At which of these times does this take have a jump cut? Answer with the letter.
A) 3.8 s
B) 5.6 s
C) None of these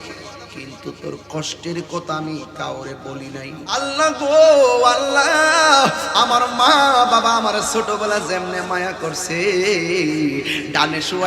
A